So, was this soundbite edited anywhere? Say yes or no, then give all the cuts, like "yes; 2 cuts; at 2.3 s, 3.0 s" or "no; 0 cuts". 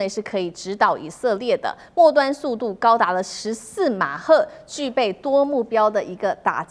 no; 0 cuts